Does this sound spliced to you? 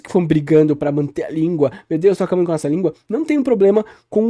no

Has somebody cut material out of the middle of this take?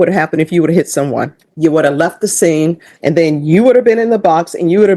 yes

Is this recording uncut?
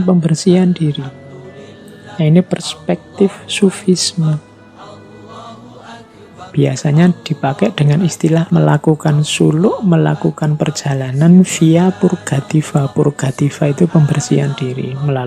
no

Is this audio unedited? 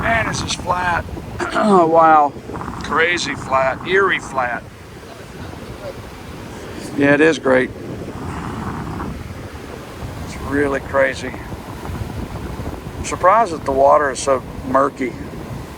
yes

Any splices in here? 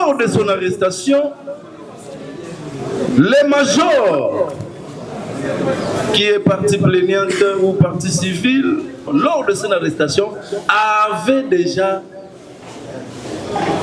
yes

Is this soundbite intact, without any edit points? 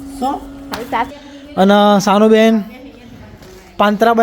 no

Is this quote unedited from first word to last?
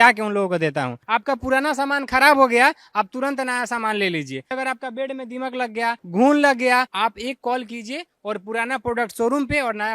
no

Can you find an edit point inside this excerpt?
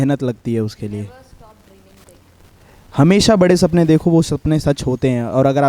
no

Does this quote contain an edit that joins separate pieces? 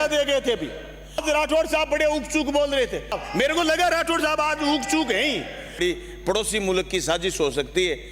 yes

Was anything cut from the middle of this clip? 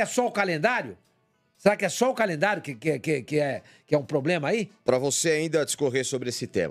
no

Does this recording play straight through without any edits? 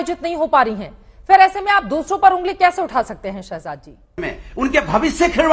no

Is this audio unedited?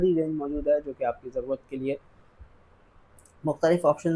yes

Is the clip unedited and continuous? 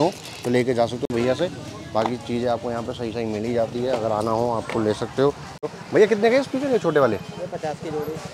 yes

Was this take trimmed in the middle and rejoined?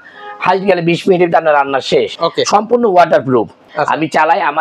yes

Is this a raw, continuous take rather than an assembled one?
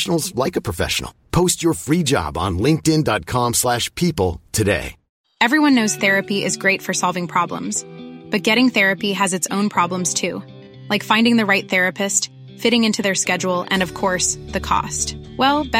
no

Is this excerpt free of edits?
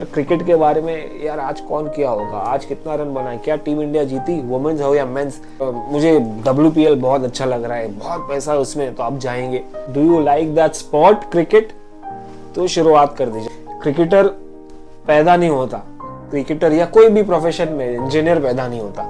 no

